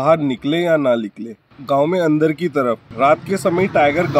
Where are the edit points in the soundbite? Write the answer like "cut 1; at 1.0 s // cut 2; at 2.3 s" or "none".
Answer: cut 1; at 1.5 s // cut 2; at 2.9 s